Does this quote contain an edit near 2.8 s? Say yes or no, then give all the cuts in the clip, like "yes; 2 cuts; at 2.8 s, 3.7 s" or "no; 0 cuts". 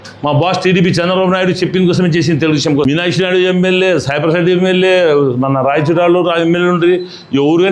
yes; 1 cut; at 2.8 s